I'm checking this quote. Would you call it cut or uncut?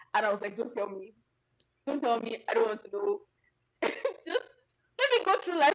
uncut